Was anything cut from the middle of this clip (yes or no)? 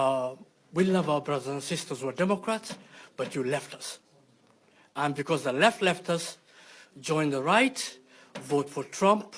no